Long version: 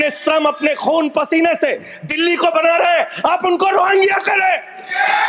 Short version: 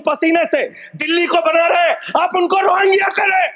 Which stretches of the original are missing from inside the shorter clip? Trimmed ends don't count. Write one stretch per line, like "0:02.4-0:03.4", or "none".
none